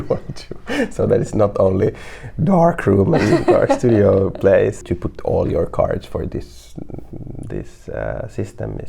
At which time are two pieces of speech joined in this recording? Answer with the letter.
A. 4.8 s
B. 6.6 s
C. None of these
A